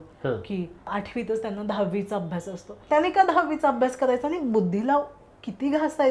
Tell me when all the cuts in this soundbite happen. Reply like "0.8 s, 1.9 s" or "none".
0.9 s, 2.8 s